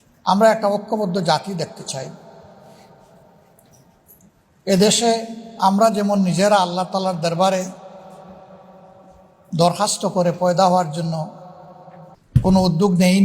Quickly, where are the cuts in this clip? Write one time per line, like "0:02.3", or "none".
0:12.1